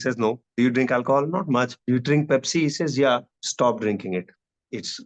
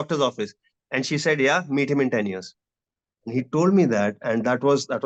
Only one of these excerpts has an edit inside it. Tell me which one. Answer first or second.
first